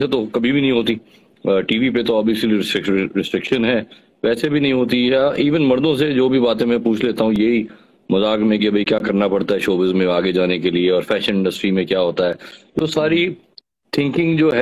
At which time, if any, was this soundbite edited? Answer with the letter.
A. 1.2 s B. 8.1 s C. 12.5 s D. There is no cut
D